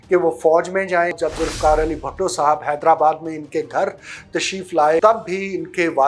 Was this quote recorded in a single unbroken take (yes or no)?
no